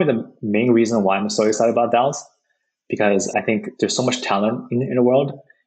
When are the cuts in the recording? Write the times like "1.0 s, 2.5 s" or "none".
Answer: 3.3 s